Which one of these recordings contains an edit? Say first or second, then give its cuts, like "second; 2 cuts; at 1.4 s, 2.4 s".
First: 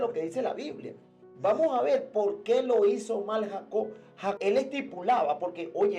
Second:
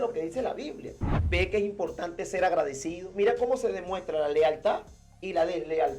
second; 1 cut; at 1.1 s